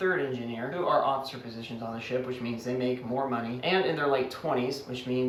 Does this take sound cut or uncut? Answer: uncut